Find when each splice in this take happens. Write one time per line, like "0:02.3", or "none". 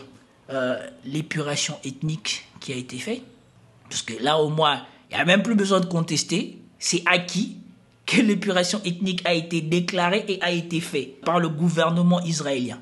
0:11.2